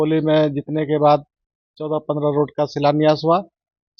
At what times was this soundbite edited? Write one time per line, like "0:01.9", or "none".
none

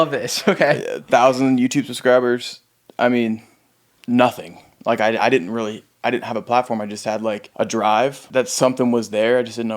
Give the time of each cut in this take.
0:07.5
0:08.2

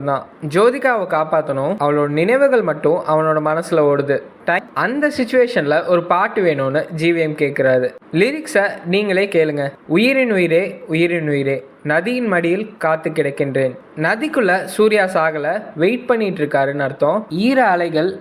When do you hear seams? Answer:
0:04.7
0:08.0

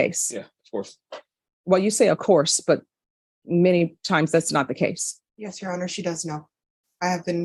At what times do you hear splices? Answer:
none

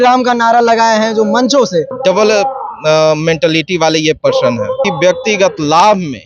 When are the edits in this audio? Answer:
0:01.9
0:04.9

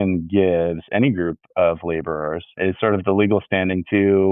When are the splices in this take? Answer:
0:02.6

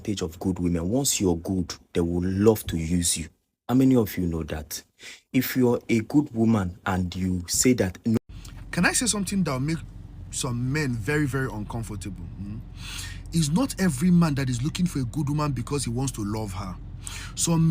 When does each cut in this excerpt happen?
0:08.2

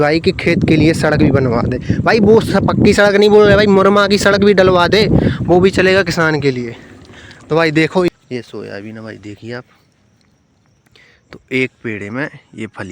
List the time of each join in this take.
0:08.1

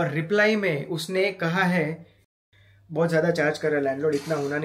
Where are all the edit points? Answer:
0:02.3

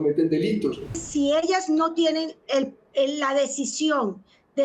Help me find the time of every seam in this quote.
0:01.0

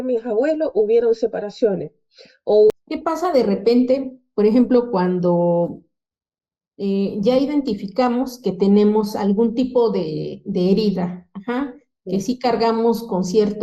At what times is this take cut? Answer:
0:02.7

